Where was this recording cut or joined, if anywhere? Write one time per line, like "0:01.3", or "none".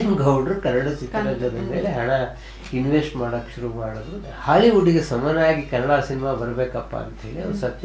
0:04.1